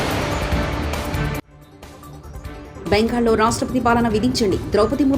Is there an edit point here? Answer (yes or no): yes